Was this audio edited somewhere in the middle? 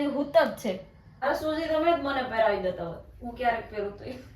yes; 1 cut; at 1.2 s

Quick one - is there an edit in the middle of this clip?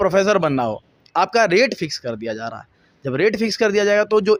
no; 0 cuts

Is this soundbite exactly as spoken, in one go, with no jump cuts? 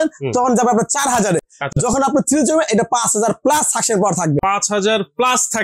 yes; 0 cuts

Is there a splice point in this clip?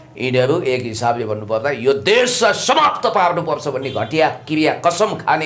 no; 0 cuts

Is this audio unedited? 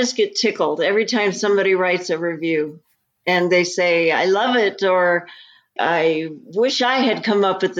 yes; 0 cuts

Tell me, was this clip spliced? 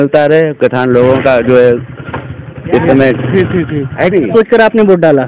yes; 1 cut; at 4.3 s

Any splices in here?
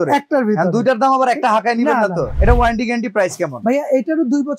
yes; 1 cut; at 2.3 s

